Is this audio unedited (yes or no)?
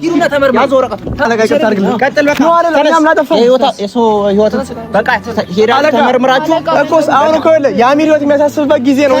no